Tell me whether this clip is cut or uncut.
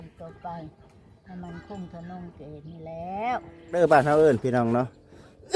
cut